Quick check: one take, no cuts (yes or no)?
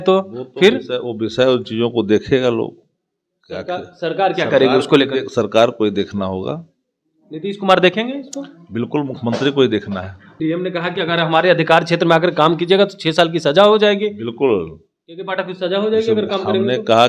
no